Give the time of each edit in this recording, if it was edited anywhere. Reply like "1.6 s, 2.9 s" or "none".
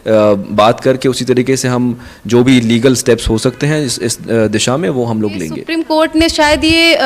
5.9 s

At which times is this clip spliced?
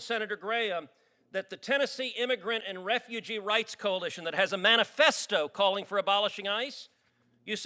none

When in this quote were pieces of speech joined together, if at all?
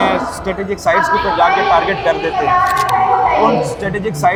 none

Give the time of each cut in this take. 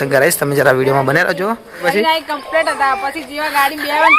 1.9 s

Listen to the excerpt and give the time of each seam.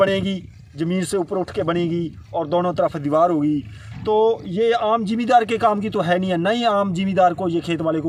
none

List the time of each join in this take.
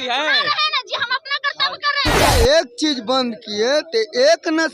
2.3 s

